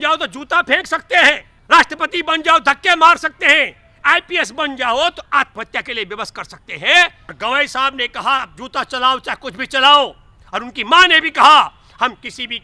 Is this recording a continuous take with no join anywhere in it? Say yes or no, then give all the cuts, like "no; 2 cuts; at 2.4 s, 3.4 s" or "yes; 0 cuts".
no; 2 cuts; at 1.5 s, 7.2 s